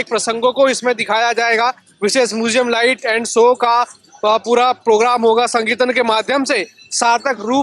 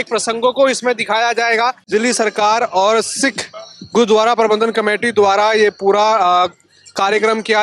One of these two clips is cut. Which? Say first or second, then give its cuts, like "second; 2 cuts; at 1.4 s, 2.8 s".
second; 1 cut; at 1.8 s